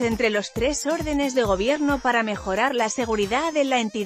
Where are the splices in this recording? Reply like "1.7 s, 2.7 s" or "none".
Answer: none